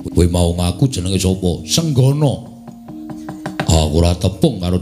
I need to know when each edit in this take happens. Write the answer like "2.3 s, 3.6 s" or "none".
none